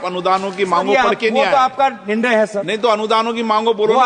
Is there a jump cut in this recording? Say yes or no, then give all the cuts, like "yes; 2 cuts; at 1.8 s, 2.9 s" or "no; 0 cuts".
no; 0 cuts